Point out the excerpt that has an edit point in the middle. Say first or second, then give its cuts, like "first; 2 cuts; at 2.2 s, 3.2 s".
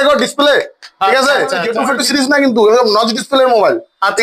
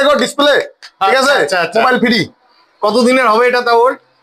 first; 1 cut; at 1.7 s